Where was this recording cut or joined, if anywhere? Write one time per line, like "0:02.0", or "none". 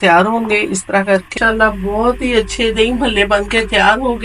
0:01.3